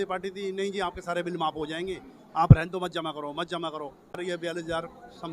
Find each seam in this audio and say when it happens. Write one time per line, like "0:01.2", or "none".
0:04.2